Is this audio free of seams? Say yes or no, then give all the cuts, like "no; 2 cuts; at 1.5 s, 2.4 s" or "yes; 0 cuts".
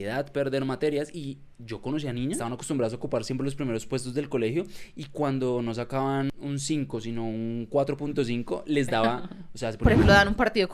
no; 3 cuts; at 2.4 s, 6.3 s, 9.8 s